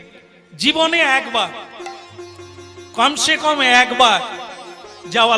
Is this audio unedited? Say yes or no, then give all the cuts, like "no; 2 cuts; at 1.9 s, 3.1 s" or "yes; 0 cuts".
yes; 0 cuts